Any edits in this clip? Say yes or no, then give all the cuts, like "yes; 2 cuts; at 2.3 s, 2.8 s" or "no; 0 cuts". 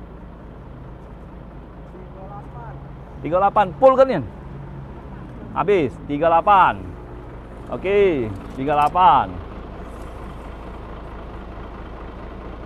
no; 0 cuts